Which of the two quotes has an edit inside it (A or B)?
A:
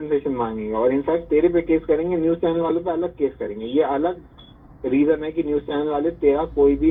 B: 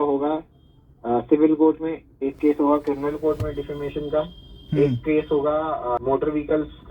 B